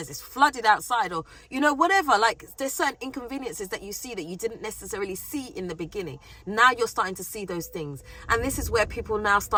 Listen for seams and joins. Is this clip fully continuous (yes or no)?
yes